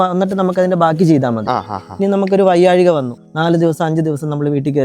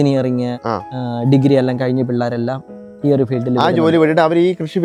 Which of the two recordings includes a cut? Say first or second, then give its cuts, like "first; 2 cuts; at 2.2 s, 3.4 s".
first; 1 cut; at 3.2 s